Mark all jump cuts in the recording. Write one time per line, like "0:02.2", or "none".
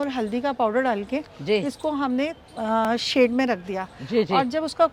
none